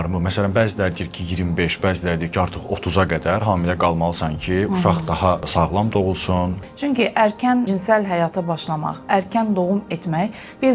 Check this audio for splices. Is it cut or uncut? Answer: cut